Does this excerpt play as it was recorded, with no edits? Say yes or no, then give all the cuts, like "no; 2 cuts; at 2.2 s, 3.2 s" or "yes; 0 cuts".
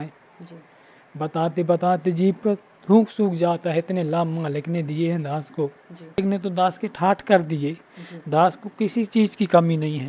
no; 1 cut; at 6.2 s